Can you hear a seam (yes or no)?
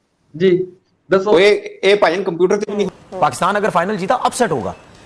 yes